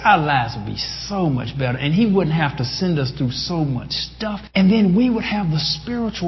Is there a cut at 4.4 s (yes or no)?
yes